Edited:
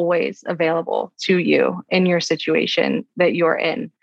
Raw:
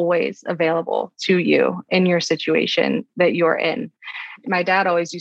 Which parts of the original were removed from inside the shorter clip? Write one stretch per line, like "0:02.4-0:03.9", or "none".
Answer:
none